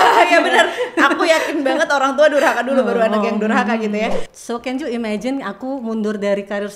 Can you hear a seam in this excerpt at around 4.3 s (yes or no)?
yes